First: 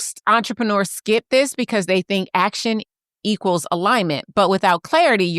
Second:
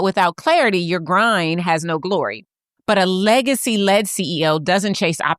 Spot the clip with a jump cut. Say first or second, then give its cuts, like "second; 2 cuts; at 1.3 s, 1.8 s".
second; 1 cut; at 2.4 s